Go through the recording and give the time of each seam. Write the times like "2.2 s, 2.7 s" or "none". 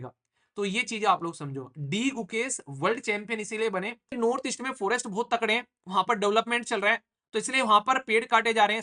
4.1 s